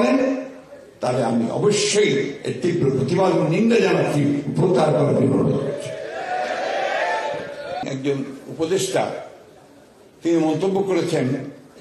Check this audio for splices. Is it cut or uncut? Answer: cut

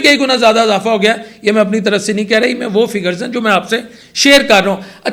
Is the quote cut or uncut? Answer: uncut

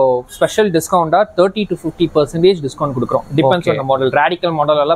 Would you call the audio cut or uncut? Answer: uncut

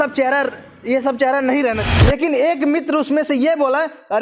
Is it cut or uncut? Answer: cut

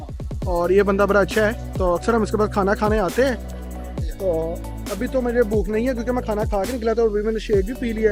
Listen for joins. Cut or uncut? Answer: uncut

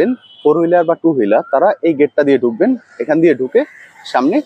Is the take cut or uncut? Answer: uncut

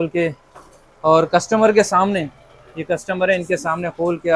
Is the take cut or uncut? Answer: uncut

